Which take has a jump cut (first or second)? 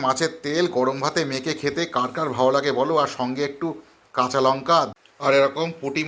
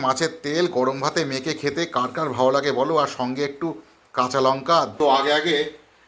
first